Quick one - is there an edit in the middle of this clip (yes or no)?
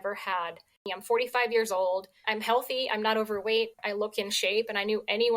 yes